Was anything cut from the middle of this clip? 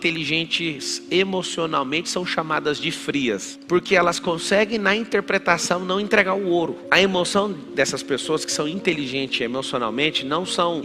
yes; 1 cut; at 3.5 s

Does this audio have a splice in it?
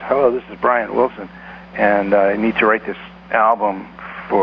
no; 0 cuts

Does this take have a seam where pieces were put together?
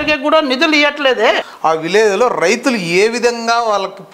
yes; 1 cut; at 1.4 s

